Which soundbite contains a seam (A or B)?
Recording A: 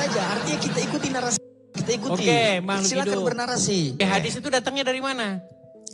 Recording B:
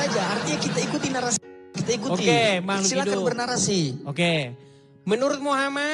A